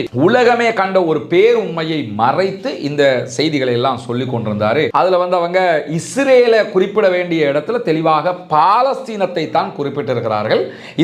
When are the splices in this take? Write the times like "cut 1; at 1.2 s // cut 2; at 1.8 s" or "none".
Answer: cut 1; at 4.9 s

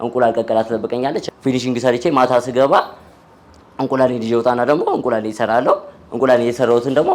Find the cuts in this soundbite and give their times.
cut 1; at 1.2 s

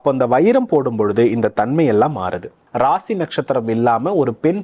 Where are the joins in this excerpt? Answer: cut 1; at 2.6 s

